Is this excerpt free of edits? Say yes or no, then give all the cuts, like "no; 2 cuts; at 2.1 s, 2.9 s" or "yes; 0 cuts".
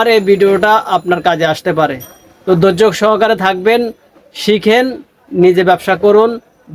yes; 0 cuts